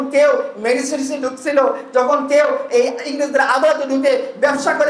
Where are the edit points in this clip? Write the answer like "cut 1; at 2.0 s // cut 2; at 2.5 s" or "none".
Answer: none

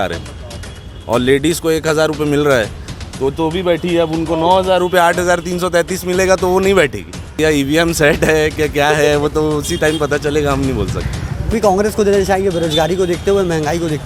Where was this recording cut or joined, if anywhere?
cut 1; at 7.3 s // cut 2; at 11.5 s

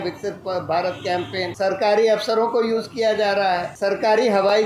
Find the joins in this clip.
cut 1; at 1.5 s // cut 2; at 3.7 s

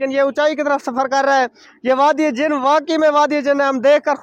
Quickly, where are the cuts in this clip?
none

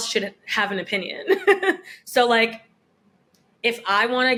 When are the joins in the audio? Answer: none

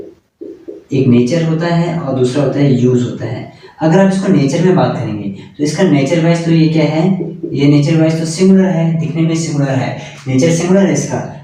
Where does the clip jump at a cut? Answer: none

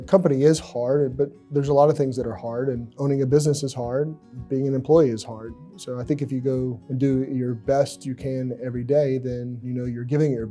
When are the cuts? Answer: cut 1; at 2.9 s // cut 2; at 6.8 s // cut 3; at 9.5 s

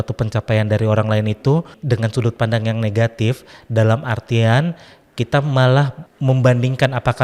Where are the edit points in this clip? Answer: cut 1; at 1.8 s // cut 2; at 6.0 s

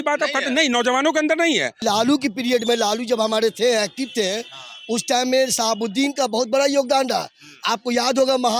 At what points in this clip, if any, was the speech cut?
cut 1; at 1.8 s

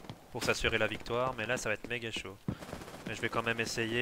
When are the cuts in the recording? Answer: cut 1; at 2.6 s

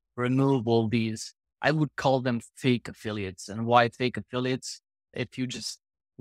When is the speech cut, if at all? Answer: cut 1; at 5.1 s

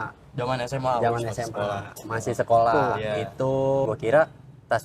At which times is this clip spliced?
cut 1; at 3.8 s

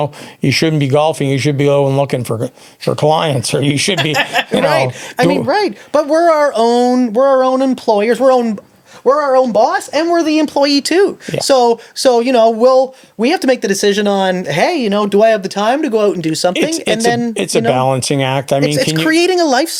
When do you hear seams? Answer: none

